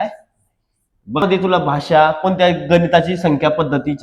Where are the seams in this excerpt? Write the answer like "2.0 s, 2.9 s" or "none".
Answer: 1.2 s